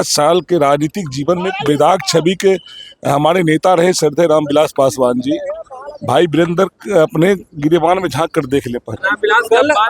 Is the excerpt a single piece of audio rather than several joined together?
yes; 0 cuts

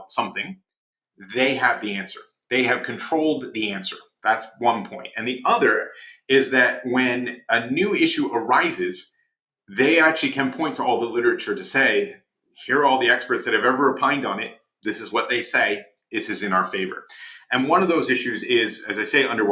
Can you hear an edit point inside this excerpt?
no; 0 cuts

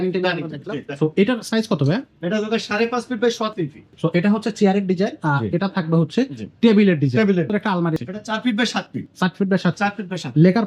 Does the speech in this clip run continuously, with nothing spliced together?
no; 2 cuts; at 3.8 s, 7.8 s

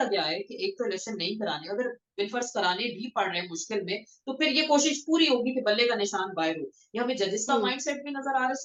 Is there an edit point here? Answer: no; 0 cuts

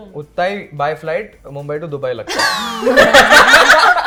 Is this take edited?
no; 0 cuts

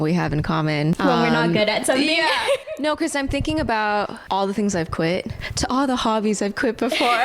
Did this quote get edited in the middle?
yes; 3 cuts; at 1.0 s, 4.2 s, 5.3 s

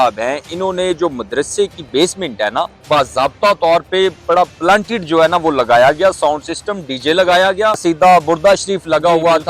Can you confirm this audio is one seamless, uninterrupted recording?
no; 2 cuts; at 2.8 s, 7.8 s

